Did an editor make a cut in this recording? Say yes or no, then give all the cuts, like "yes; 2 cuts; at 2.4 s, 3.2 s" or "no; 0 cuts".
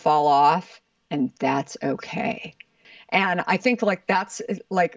yes; 1 cut; at 2.8 s